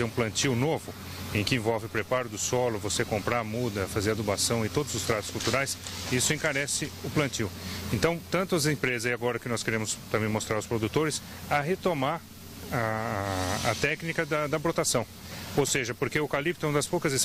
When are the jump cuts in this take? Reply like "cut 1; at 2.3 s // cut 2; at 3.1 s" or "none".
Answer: none